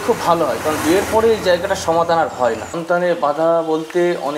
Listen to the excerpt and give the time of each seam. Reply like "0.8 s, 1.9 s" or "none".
2.7 s